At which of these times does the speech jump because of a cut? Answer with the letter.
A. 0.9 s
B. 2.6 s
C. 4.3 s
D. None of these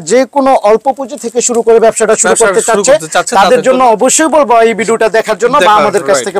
D